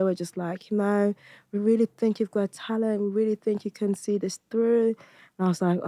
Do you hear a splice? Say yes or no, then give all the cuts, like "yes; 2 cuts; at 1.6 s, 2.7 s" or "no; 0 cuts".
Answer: no; 0 cuts